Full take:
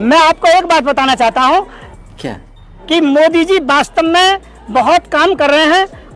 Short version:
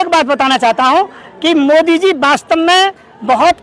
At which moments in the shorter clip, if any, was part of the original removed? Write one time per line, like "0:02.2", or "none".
0:01.2